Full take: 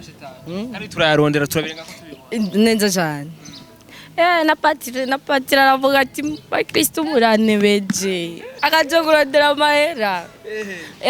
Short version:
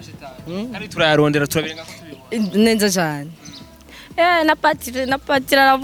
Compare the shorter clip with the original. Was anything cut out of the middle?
no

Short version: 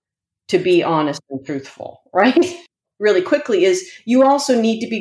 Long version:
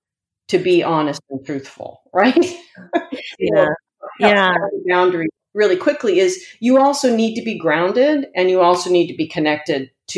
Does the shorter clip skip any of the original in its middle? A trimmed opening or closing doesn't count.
yes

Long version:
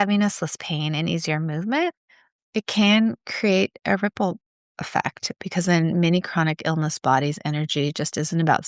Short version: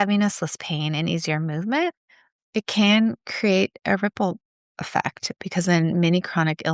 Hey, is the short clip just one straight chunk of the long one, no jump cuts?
yes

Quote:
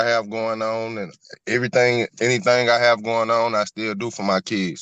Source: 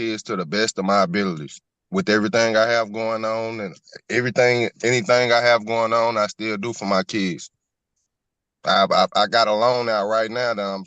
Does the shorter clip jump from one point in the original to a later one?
no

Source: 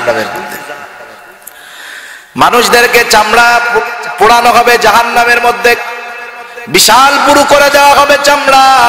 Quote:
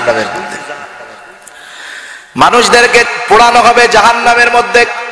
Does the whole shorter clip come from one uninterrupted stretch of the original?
no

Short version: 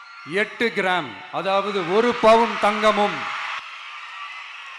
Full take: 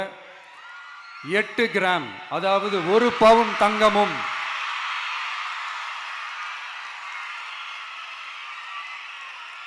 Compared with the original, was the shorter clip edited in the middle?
yes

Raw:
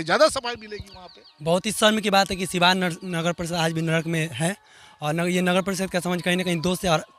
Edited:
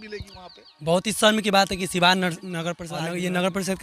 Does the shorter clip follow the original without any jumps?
no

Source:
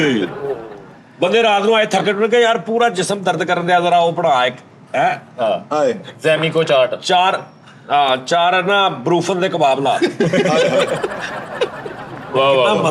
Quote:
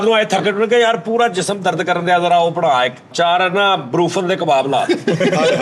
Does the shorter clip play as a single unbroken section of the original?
no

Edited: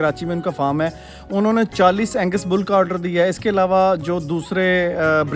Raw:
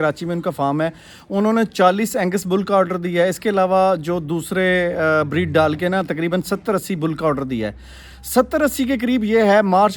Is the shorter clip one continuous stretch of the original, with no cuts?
yes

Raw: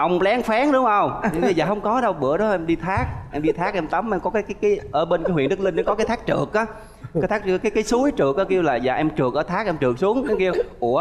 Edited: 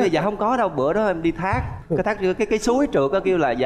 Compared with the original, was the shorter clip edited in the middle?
yes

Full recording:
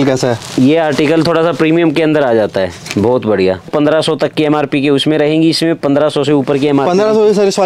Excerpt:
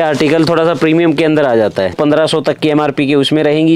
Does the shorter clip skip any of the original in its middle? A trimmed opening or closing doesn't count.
yes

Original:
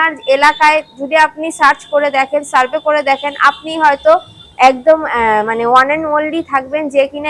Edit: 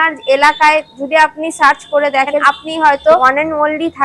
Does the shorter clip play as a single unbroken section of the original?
no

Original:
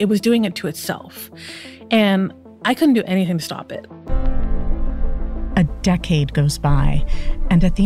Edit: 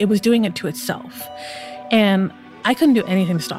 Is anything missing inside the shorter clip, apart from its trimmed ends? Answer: no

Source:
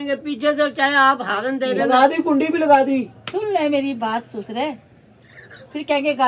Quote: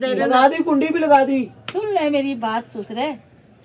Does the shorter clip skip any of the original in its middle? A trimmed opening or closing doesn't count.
no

